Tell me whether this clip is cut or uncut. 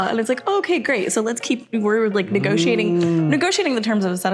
uncut